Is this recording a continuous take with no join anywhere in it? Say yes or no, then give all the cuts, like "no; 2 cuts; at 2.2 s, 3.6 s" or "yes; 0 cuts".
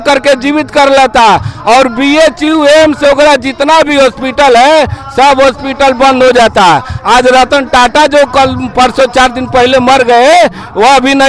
yes; 0 cuts